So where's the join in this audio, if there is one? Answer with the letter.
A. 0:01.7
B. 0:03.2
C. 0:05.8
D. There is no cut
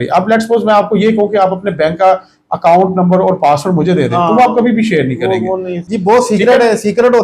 C